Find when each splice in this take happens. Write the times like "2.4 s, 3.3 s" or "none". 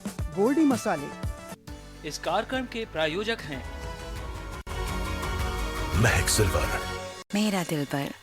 7.1 s